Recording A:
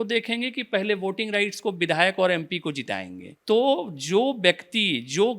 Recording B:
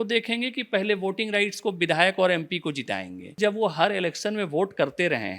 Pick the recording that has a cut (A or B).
B